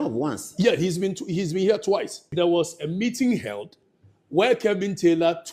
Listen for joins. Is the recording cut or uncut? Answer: cut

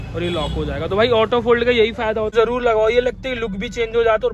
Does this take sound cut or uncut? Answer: cut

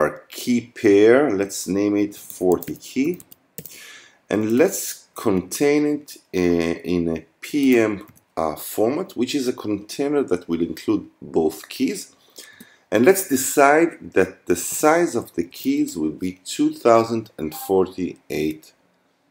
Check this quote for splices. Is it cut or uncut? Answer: uncut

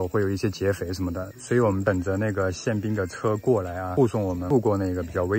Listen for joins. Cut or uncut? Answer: cut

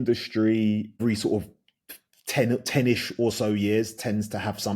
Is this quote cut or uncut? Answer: cut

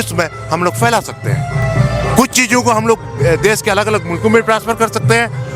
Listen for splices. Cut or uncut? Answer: uncut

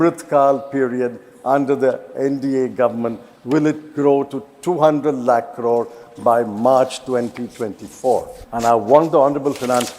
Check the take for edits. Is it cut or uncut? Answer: cut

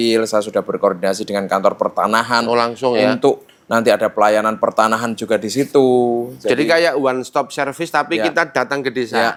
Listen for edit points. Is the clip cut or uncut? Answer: uncut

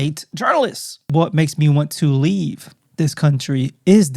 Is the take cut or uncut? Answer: cut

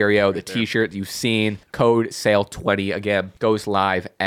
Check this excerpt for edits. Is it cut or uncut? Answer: cut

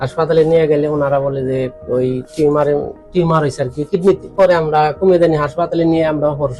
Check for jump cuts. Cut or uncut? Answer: cut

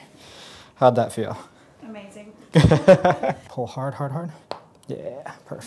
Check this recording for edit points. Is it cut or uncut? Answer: cut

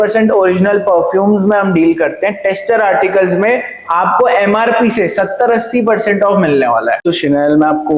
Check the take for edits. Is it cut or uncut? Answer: cut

